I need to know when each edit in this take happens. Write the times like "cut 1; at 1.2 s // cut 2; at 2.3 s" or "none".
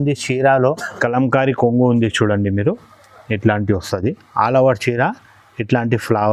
cut 1; at 0.9 s